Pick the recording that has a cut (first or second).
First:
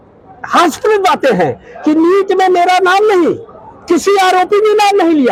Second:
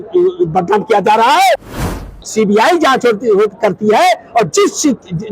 second